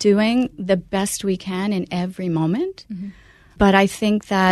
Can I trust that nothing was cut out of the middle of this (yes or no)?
no